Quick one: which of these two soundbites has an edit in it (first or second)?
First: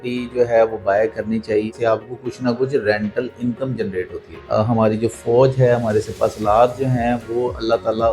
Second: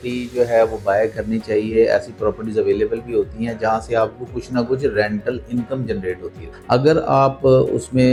first